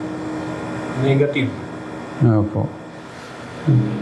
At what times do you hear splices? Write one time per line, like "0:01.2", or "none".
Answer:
none